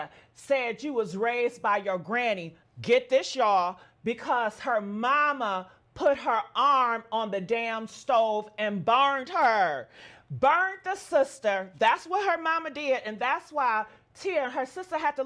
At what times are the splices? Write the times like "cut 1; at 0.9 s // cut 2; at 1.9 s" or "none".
none